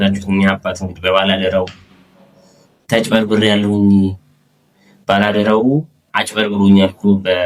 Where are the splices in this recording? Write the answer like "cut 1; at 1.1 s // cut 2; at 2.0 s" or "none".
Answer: none